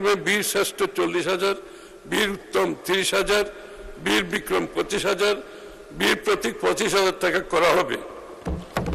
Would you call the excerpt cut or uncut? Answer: uncut